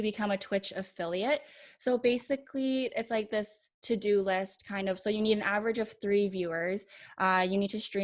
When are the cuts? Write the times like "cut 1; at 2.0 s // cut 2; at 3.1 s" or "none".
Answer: none